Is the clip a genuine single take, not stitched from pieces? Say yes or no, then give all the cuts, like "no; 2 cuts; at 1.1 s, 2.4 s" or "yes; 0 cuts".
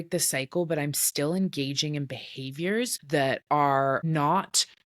no; 2 cuts; at 3.0 s, 4.0 s